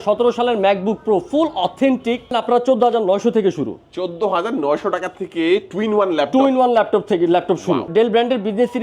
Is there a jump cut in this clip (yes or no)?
yes